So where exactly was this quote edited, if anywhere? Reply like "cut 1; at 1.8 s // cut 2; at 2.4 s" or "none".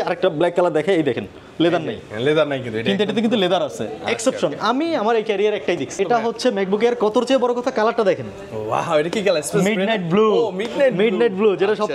cut 1; at 6.0 s